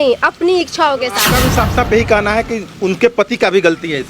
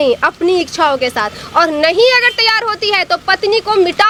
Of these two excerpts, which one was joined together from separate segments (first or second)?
first